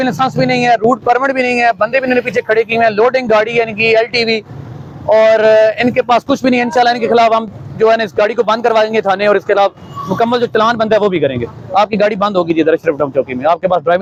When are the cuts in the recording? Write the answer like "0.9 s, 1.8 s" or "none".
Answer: none